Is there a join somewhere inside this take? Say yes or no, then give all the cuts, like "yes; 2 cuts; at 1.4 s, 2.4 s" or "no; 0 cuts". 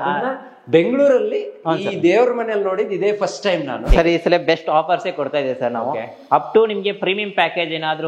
yes; 1 cut; at 3.9 s